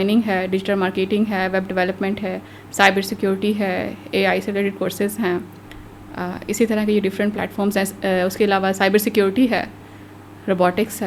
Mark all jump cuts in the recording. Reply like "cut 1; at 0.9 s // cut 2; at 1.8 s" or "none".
none